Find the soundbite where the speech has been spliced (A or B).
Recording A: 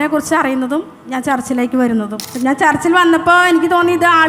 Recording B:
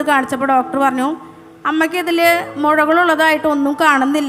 A